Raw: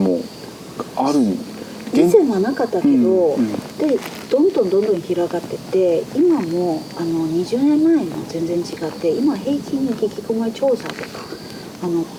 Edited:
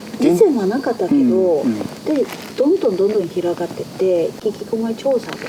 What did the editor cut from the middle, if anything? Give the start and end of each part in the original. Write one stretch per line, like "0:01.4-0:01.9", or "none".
0:06.1-0:09.9